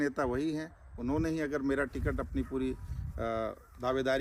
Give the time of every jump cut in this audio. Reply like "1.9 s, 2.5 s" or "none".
none